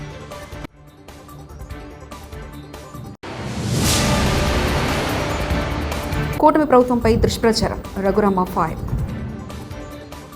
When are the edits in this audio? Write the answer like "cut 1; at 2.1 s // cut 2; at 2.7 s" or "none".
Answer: cut 1; at 3.1 s